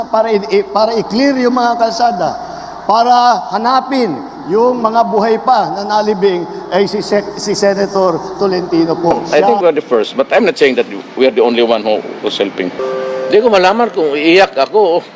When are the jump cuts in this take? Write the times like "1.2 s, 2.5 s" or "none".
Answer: 9.2 s, 12.4 s